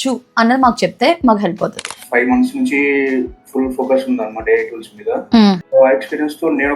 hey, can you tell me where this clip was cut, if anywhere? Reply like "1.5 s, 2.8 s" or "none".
1.8 s, 5.6 s